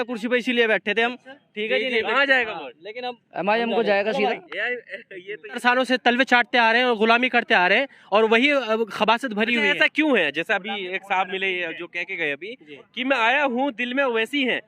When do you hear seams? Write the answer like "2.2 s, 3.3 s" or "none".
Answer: 5.6 s